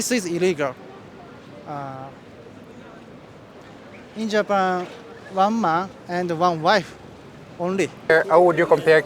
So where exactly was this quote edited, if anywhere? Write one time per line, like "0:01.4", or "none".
0:08.1